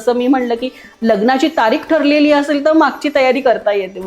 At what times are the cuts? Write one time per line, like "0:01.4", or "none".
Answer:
none